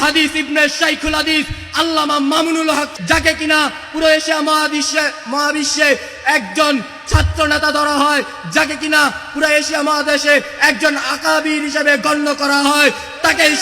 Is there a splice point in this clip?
yes; 1 cut; at 2.9 s

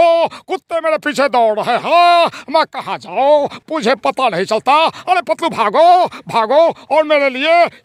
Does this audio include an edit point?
no; 0 cuts

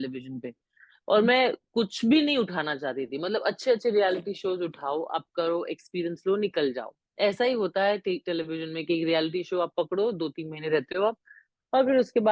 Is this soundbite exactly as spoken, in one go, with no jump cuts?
yes; 0 cuts

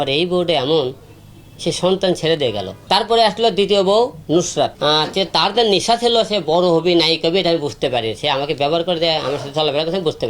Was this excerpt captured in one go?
no; 2 cuts; at 2.7 s, 4.7 s

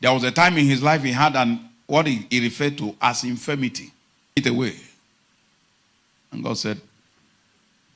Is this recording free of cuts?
no; 1 cut; at 4.4 s

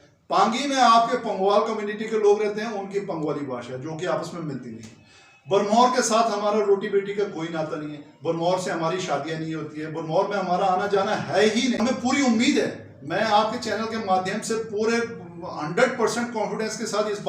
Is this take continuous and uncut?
no; 1 cut; at 11.8 s

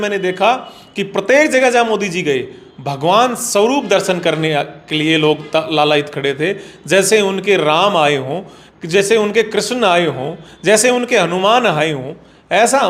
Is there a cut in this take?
no; 0 cuts

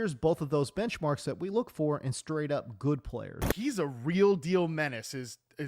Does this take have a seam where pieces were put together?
yes; 1 cut; at 3.4 s

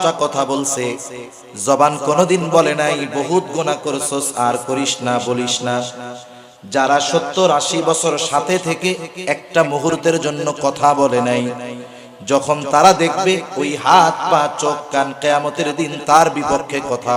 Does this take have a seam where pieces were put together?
no; 0 cuts

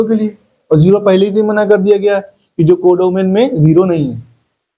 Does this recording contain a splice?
no; 0 cuts

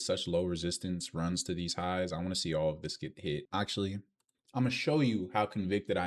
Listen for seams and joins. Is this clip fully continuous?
no; 1 cut; at 3.5 s

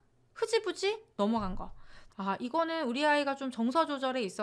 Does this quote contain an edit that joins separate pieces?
yes; 1 cut; at 2.0 s

